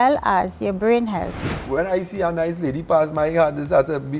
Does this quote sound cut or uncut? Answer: cut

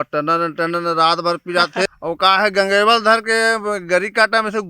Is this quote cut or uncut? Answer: cut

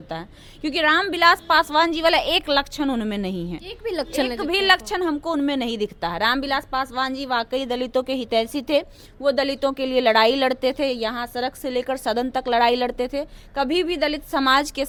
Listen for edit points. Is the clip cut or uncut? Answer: uncut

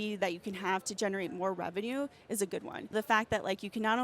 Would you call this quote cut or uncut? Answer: cut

